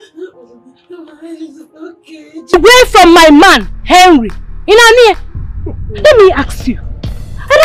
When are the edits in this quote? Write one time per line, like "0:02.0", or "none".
0:02.5